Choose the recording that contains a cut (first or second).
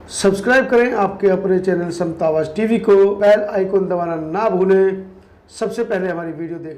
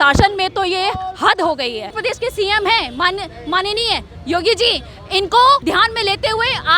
second